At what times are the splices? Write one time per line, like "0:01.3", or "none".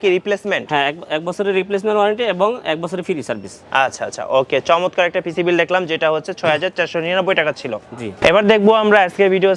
none